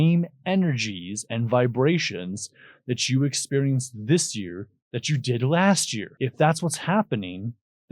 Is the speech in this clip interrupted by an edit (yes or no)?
yes